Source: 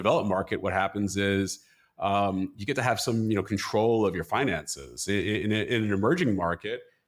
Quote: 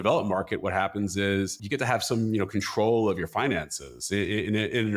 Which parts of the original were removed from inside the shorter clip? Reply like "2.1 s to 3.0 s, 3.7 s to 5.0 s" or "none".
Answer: 1.6 s to 2.6 s